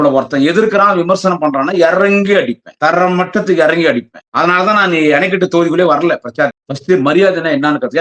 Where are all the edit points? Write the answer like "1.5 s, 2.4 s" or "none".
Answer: 2.6 s, 4.2 s, 6.7 s